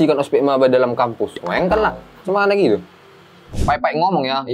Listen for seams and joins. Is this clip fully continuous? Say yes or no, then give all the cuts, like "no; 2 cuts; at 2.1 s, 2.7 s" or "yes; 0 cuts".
no; 1 cut; at 3.6 s